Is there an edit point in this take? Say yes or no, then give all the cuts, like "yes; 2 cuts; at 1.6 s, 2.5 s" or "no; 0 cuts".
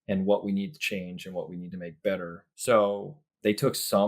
yes; 1 cut; at 2.4 s